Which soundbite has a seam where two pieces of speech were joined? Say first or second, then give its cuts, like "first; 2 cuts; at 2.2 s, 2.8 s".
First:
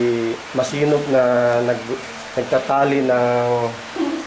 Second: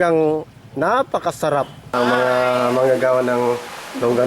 second; 1 cut; at 1.9 s